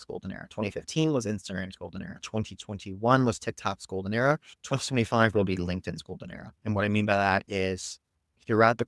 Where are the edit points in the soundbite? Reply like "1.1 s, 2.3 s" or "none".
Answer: none